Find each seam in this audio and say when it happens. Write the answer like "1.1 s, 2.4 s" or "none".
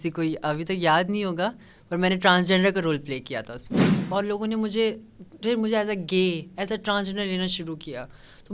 3.8 s